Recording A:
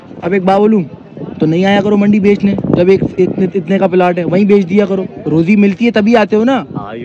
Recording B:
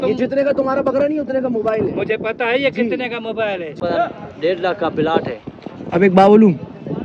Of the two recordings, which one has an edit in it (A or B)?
B